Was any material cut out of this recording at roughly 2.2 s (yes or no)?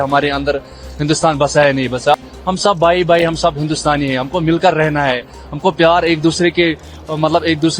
yes